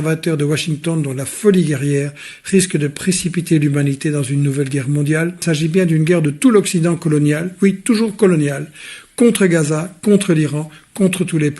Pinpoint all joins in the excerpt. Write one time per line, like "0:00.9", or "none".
0:05.4